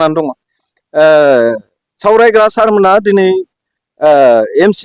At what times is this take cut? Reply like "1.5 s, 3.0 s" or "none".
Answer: none